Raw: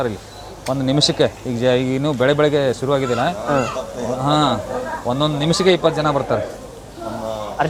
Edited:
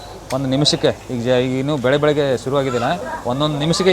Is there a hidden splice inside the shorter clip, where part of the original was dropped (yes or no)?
yes